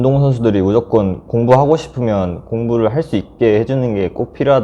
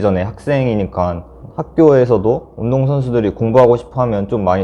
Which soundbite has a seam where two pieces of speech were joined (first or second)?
second